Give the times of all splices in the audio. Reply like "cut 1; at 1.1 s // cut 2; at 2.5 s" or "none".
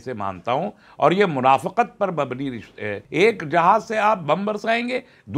cut 1; at 3.0 s